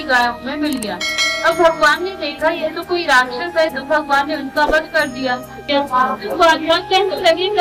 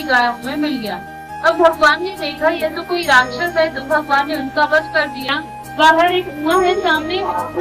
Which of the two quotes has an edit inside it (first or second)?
second